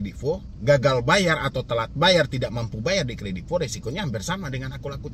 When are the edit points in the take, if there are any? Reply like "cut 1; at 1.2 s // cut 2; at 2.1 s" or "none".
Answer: none